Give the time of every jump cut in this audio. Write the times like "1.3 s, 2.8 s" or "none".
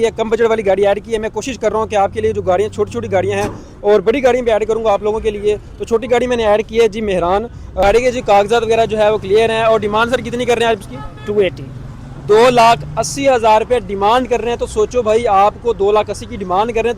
7.8 s